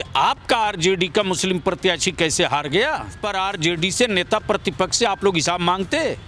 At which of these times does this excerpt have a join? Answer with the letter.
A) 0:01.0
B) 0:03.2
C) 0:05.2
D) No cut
B